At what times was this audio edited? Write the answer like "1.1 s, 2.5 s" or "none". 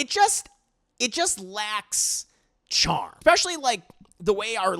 3.1 s